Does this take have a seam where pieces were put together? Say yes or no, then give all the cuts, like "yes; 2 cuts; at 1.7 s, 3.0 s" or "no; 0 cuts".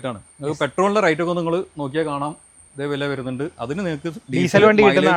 no; 0 cuts